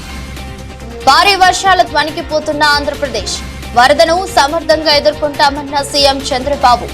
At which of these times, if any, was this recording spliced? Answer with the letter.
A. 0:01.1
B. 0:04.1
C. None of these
A